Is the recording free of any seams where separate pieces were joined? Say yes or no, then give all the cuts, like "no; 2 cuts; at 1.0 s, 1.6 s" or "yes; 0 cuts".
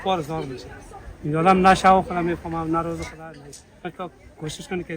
no; 1 cut; at 3.9 s